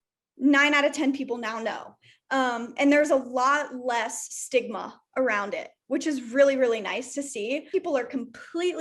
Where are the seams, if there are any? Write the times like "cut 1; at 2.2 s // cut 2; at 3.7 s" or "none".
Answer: cut 1; at 7.7 s